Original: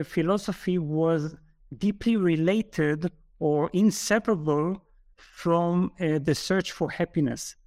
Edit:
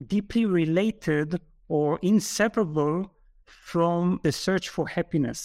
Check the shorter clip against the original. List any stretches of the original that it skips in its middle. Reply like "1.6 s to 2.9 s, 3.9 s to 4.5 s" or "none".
5.9 s to 6.2 s